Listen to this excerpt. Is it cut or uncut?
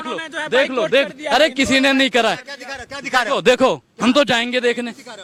uncut